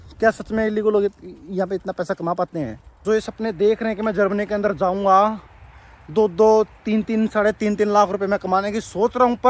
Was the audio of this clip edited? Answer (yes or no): yes